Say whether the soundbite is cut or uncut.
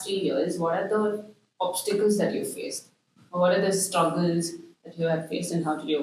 uncut